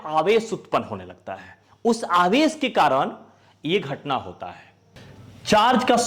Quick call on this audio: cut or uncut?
uncut